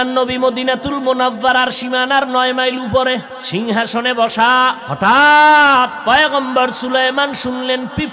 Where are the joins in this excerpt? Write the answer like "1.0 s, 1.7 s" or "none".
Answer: 3.4 s, 4.9 s, 6.0 s